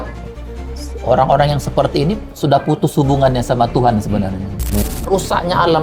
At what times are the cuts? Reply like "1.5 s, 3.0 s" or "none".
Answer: 4.8 s